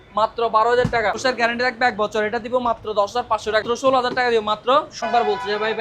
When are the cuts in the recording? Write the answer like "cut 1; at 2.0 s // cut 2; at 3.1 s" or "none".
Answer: cut 1; at 1.2 s // cut 2; at 3.6 s // cut 3; at 5.0 s